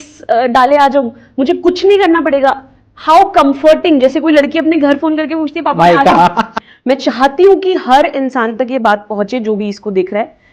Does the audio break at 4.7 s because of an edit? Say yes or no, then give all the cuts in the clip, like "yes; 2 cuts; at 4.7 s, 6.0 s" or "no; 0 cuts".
no; 1 cut; at 6.7 s